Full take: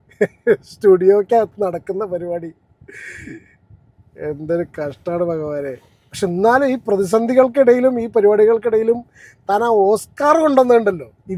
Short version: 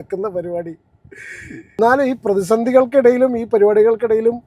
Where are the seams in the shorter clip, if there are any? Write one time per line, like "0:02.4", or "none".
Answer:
0:01.8